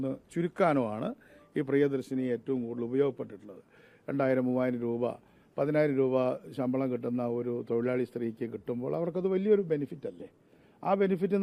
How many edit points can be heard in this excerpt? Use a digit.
0